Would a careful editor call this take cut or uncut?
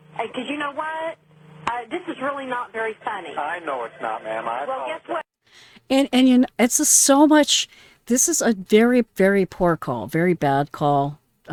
uncut